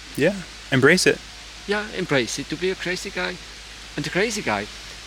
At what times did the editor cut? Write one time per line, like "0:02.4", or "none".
none